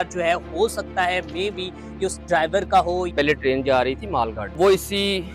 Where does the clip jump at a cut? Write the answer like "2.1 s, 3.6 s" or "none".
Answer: 3.1 s, 4.5 s